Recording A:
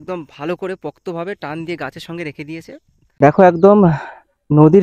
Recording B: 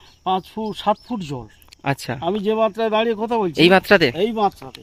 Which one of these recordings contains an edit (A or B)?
A